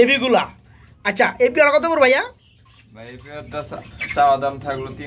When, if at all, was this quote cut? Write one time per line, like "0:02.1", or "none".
none

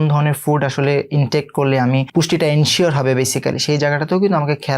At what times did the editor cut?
0:02.1

